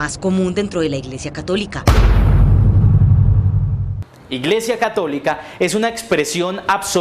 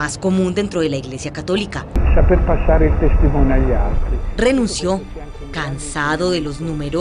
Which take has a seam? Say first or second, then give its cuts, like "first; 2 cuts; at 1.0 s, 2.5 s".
second; 1 cut; at 2.0 s